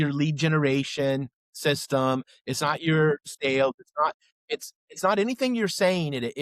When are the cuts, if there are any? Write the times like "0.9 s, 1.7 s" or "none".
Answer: 3.3 s